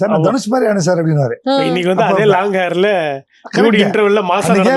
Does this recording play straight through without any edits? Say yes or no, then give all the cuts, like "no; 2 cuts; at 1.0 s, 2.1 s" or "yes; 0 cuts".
yes; 0 cuts